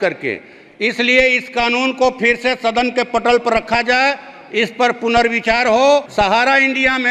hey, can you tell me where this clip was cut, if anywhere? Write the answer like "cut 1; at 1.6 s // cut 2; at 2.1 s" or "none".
cut 1; at 6.1 s